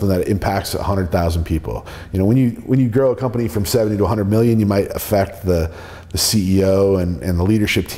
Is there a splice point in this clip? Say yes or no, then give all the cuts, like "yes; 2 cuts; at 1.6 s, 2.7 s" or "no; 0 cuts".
no; 0 cuts